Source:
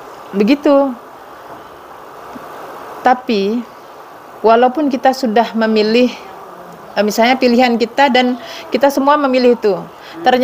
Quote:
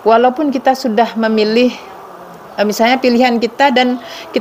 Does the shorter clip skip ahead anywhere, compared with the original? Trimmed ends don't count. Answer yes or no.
no